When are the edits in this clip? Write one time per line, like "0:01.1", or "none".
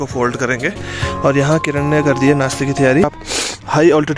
0:01.0
0:03.1